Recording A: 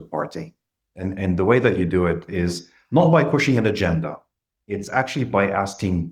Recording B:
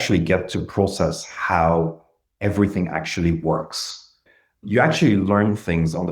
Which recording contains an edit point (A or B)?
B